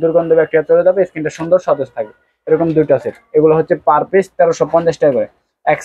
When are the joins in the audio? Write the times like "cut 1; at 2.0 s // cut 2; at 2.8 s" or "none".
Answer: none